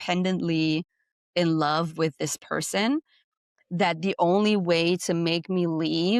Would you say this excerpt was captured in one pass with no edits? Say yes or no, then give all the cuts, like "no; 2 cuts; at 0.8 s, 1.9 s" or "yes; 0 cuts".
yes; 0 cuts